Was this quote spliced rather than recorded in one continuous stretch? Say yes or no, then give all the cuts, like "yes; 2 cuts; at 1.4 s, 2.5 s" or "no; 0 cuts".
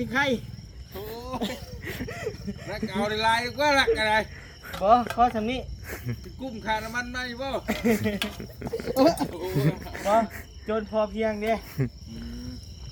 no; 0 cuts